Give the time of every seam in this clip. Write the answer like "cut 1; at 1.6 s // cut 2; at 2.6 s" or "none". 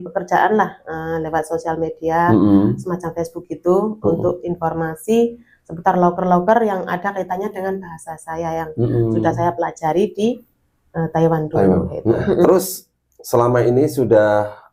none